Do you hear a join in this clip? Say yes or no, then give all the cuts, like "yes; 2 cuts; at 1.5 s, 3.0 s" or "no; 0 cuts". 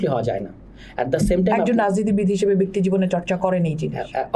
no; 0 cuts